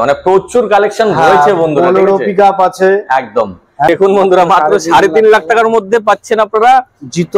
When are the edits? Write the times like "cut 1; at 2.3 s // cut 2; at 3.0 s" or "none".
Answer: cut 1; at 3.9 s